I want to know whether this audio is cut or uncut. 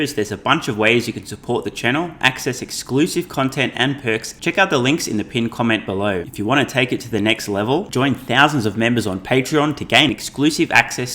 cut